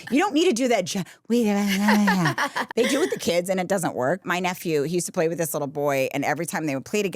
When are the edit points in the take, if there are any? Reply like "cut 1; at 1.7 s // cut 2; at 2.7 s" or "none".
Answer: cut 1; at 2.6 s // cut 2; at 4.2 s